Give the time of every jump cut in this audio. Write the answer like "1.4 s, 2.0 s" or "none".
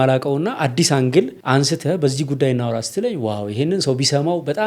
1.4 s